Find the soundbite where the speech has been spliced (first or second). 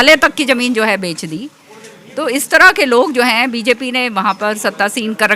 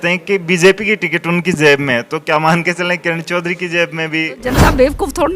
second